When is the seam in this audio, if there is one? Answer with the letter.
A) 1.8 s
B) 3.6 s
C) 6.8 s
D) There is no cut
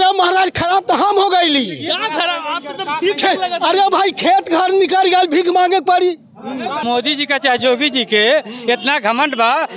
C